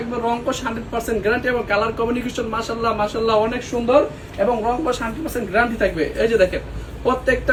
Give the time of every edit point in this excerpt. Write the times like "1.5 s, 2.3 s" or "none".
none